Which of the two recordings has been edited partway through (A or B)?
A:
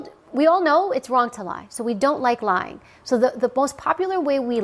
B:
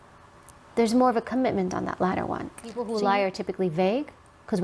B